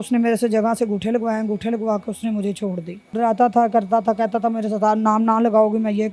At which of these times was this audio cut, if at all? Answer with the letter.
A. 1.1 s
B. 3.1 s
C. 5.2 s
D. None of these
B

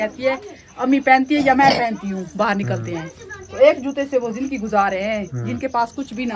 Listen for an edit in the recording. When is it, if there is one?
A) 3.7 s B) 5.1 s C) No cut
C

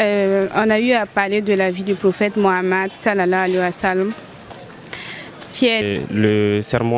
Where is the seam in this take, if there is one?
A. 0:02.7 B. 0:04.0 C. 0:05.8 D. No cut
C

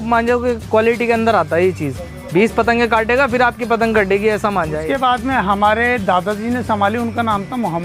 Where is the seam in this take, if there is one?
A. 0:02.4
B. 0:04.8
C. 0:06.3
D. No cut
B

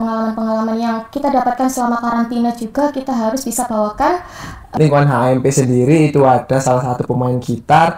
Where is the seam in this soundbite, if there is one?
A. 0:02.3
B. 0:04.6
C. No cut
B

